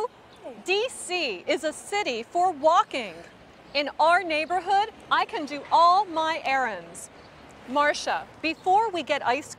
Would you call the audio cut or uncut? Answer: uncut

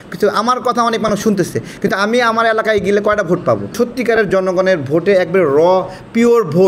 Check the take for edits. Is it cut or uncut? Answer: cut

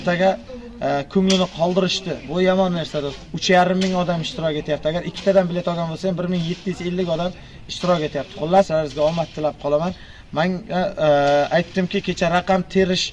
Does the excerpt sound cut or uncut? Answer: cut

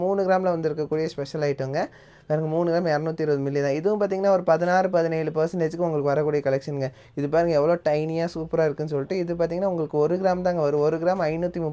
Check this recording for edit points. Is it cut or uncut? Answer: uncut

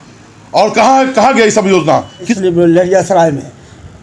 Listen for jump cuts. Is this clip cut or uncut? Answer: cut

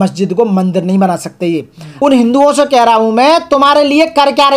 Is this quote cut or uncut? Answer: cut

